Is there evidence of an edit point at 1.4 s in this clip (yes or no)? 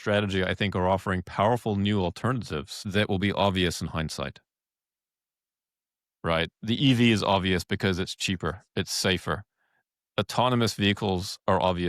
no